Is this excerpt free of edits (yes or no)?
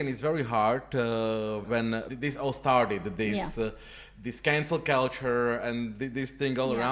no